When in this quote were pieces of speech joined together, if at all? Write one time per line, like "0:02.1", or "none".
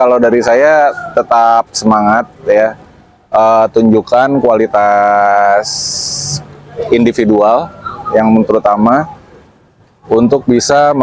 none